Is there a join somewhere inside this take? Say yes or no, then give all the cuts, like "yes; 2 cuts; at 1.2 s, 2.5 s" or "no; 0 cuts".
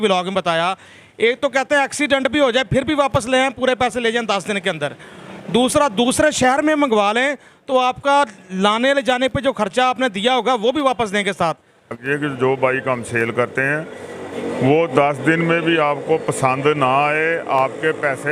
yes; 1 cut; at 12.0 s